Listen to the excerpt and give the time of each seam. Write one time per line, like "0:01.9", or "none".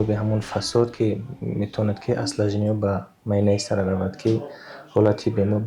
none